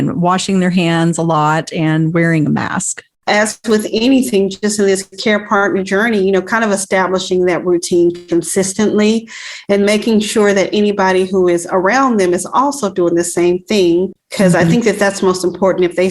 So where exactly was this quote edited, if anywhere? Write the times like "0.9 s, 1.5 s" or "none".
3.3 s, 14.2 s

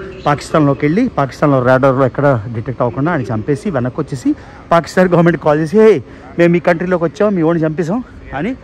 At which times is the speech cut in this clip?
none

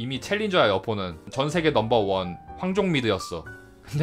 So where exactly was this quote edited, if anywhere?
1.2 s

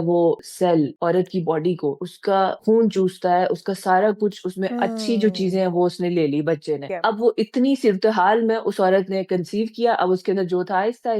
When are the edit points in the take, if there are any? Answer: 0.7 s, 2.4 s, 6.9 s

